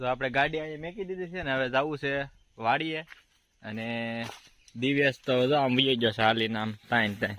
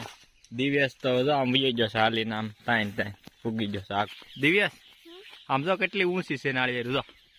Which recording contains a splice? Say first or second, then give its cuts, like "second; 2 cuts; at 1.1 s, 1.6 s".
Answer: second; 1 cut; at 4.1 s